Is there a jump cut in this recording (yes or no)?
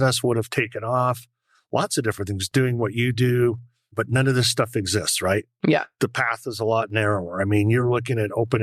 no